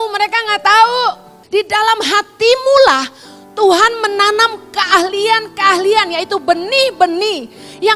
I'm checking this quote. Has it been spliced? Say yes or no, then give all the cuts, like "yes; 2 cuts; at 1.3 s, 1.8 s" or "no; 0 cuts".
yes; 1 cut; at 1.3 s